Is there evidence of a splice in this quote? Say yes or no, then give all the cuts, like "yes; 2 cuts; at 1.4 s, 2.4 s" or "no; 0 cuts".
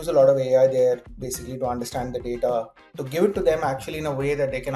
no; 0 cuts